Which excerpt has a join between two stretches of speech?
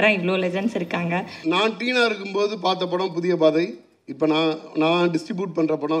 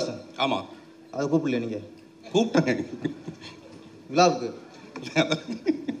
first; 1 cut; at 1.3 s

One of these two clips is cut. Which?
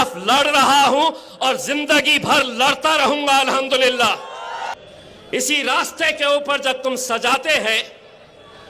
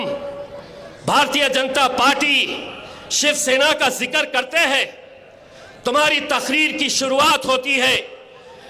first; 1 cut; at 4.7 s

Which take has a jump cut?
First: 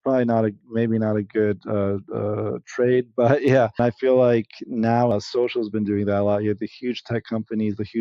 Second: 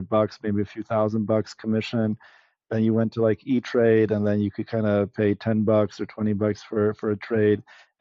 first; 2 cuts; at 3.8 s, 5.1 s

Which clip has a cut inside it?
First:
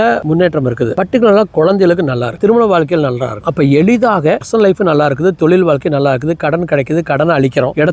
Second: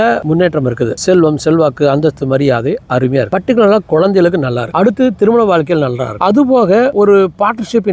first; 4 cuts; at 0.9 s, 2.4 s, 3.4 s, 4.4 s

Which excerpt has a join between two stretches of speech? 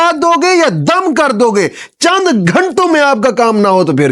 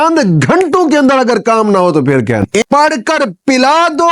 second; 1 cut; at 2.6 s

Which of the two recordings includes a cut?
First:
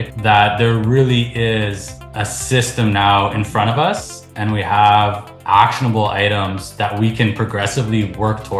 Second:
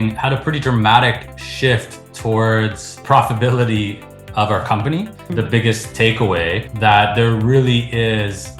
second; 1 cut; at 5.2 s

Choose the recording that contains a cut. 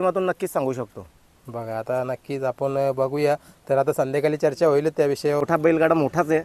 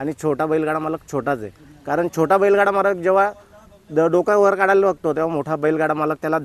first; 1 cut; at 5.4 s

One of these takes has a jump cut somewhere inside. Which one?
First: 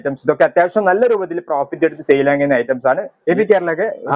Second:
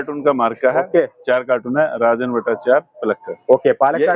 first; 1 cut; at 3.1 s

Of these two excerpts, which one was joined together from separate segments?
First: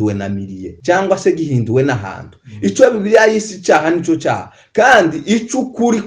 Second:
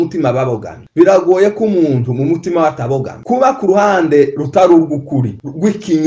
second; 1 cut; at 3.1 s

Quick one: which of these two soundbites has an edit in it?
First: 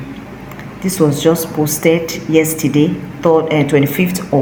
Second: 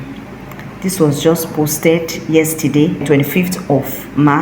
second; 1 cut; at 3.0 s

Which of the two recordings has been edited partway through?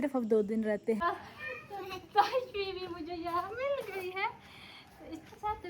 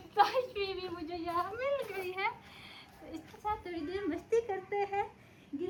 first; 1 cut; at 1.0 s

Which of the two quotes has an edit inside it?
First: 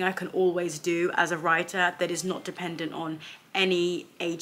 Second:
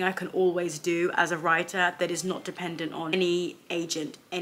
second; 1 cut; at 3.1 s

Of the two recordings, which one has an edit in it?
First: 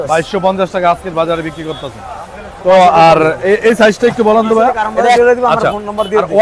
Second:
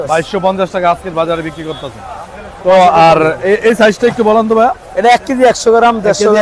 first; 1 cut; at 5.2 s

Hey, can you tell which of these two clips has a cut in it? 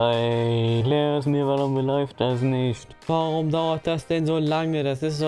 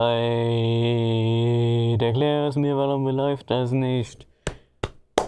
first; 2 cuts; at 0.8 s, 2.9 s

